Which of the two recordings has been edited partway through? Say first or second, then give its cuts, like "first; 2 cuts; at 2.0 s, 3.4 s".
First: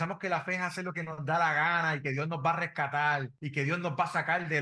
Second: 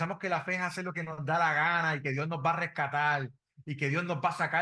first; 1 cut; at 3.4 s